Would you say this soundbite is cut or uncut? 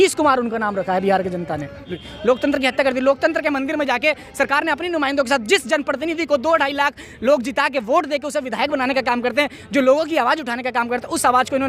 cut